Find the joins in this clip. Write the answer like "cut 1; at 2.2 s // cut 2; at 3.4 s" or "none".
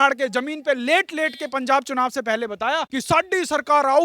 cut 1; at 2.9 s